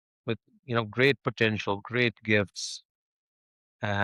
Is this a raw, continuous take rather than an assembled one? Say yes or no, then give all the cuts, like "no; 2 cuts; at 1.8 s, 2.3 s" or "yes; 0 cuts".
yes; 0 cuts